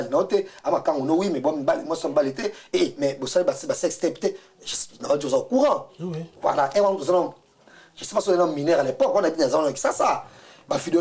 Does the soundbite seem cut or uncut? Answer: uncut